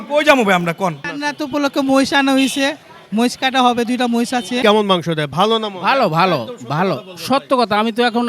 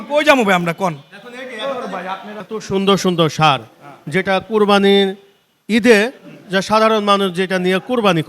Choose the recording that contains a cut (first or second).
first